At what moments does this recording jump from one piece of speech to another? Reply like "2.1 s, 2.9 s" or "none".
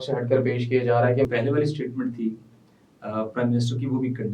1.3 s